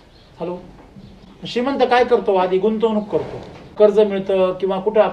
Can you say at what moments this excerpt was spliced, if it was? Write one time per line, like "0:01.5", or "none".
0:03.7